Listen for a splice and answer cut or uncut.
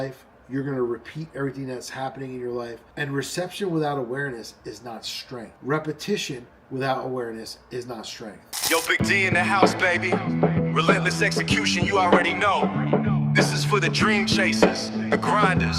cut